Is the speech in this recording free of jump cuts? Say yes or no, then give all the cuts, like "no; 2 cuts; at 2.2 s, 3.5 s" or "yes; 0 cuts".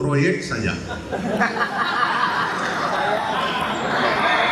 yes; 0 cuts